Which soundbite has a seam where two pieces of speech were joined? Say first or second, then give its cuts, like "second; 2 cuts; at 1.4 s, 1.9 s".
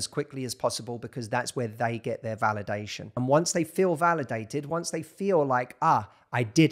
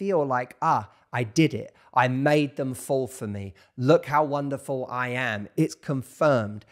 first; 1 cut; at 3.0 s